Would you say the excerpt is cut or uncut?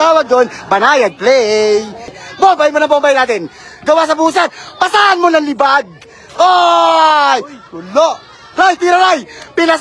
cut